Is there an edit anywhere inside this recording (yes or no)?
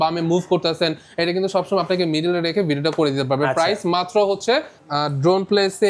yes